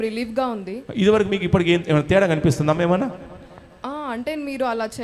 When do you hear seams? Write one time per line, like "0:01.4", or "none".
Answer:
none